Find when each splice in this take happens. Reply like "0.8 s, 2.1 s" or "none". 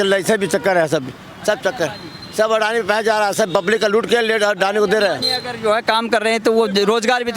none